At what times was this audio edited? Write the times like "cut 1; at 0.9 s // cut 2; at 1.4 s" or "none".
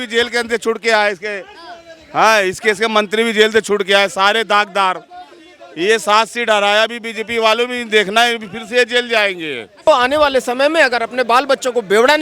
cut 1; at 9.9 s